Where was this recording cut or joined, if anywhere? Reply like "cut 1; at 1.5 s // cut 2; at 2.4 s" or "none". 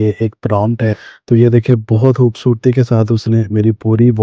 cut 1; at 0.9 s

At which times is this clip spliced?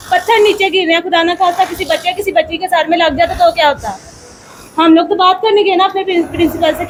none

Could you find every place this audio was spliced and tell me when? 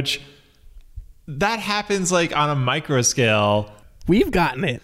cut 1; at 3.8 s

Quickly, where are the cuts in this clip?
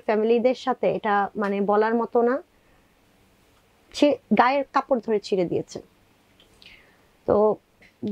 none

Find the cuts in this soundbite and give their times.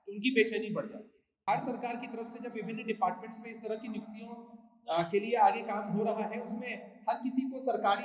cut 1; at 1.5 s

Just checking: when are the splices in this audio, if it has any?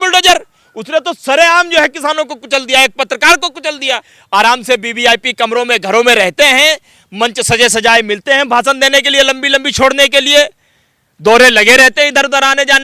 cut 1; at 4.1 s

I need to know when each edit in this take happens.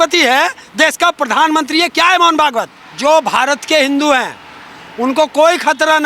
cut 1; at 2.8 s

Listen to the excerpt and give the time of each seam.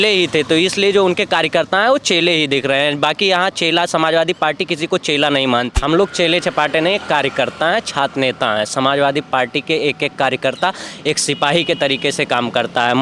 cut 1; at 5.7 s

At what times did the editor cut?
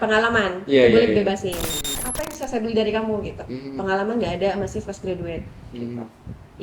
cut 1; at 1.9 s

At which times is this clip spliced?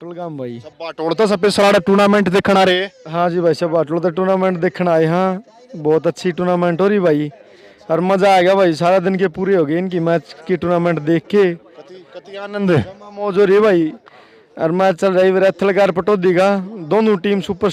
none

